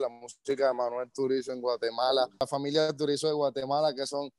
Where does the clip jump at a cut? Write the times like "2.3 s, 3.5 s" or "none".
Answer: 2.4 s